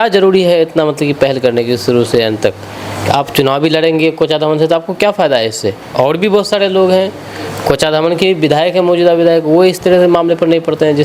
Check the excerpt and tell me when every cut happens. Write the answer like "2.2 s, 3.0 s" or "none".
none